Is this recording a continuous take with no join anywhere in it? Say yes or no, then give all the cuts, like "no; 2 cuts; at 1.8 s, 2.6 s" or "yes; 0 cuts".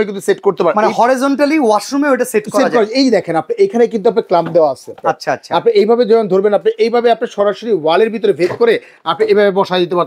yes; 0 cuts